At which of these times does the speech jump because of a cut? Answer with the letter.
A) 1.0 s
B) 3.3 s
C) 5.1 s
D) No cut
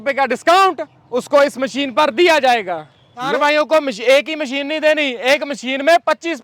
B